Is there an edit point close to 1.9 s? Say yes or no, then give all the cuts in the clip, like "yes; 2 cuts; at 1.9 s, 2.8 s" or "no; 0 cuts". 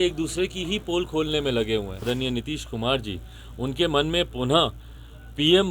yes; 1 cut; at 1.9 s